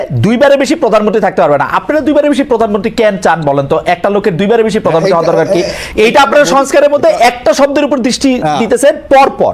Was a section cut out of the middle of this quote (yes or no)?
no